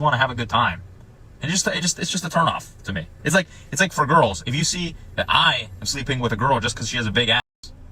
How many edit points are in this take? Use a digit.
1